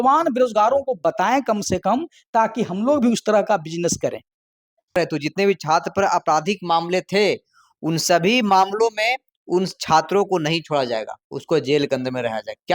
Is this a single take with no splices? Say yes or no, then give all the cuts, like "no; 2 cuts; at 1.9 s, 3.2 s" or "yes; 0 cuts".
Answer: no; 1 cut; at 4.9 s